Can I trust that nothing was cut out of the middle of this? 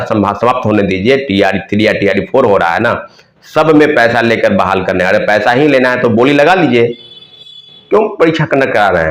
yes; 0 cuts

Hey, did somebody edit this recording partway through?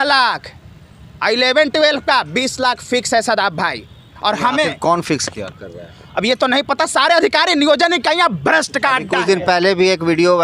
no; 0 cuts

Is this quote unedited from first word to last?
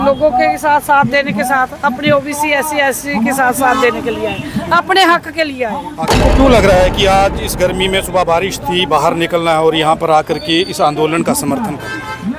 no; 1 cut; at 6.2 s

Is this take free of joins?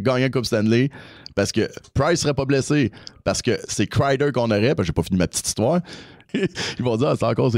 no; 1 cut; at 6.3 s

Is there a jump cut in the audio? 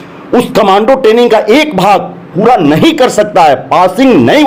no; 0 cuts

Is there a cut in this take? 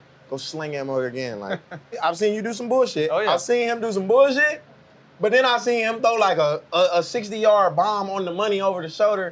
yes; 1 cut; at 2.0 s

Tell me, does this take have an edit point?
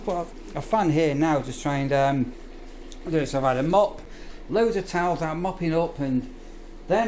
no; 0 cuts

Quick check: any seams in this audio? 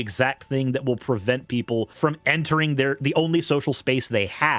yes; 1 cut; at 1.9 s

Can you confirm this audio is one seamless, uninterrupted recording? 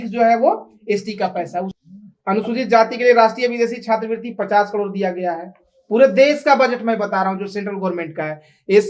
no; 1 cut; at 1.7 s

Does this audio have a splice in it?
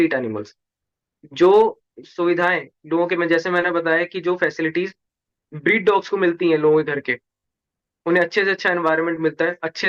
no; 0 cuts

